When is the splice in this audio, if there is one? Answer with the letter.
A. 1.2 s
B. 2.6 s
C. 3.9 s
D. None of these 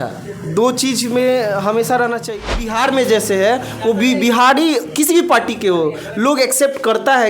B